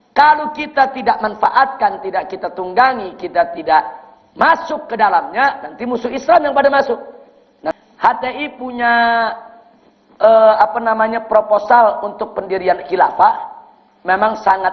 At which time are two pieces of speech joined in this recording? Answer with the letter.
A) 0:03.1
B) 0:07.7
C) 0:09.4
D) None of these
B